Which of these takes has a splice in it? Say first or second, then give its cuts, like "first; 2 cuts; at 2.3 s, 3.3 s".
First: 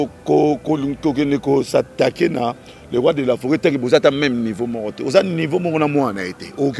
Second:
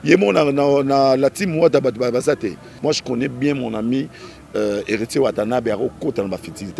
second; 1 cut; at 2.7 s